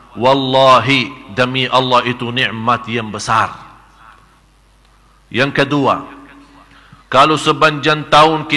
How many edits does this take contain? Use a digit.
1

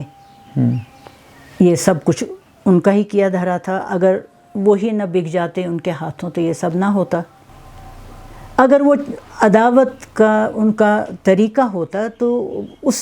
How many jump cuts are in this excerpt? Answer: 1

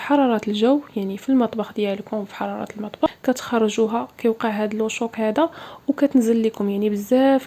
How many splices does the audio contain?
1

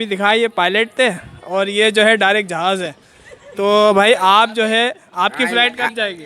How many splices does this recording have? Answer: 1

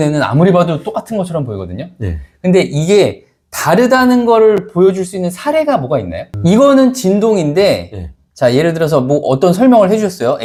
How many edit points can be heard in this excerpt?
0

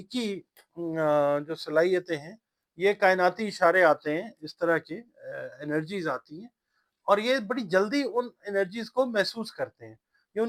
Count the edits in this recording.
0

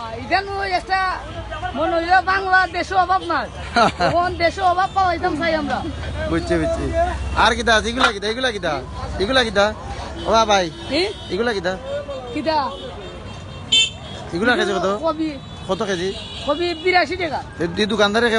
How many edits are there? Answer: 0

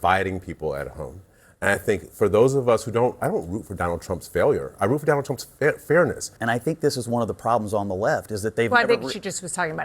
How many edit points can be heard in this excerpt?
1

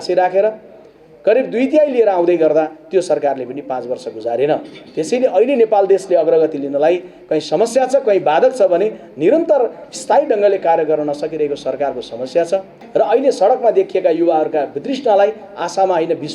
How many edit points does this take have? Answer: 1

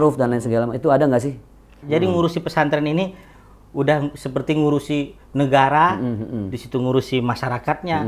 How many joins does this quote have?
1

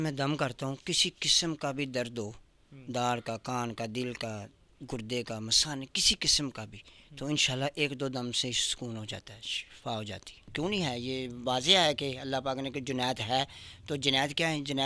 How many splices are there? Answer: 1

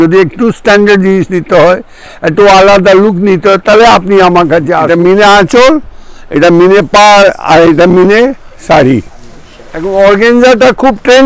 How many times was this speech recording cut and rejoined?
2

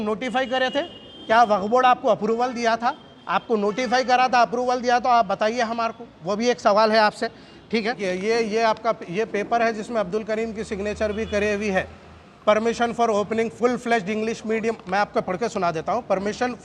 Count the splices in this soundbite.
1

